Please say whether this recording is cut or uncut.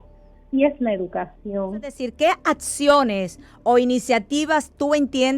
cut